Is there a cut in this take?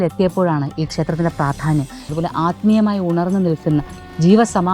yes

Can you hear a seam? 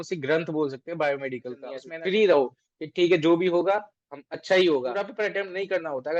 yes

